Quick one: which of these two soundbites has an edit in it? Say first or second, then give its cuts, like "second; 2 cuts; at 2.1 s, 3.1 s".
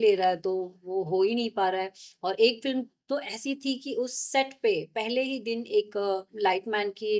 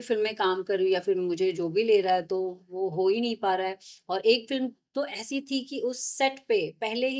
first; 1 cut; at 6.3 s